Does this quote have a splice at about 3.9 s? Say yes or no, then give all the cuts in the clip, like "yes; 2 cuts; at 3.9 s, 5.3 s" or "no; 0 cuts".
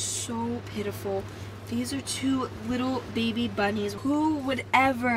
yes; 1 cut; at 3.9 s